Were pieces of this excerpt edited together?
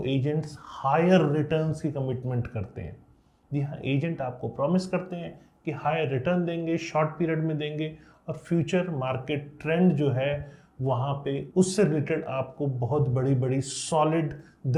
no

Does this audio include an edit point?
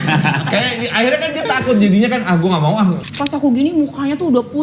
yes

